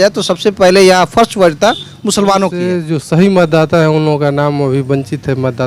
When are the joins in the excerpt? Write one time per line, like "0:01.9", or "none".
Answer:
0:02.8